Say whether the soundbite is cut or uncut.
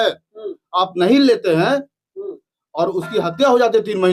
uncut